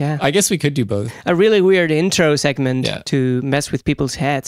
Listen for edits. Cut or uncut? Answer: cut